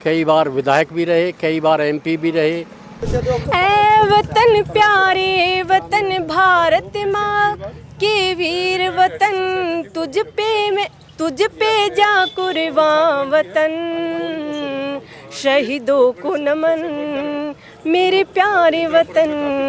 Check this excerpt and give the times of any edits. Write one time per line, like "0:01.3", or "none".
0:03.0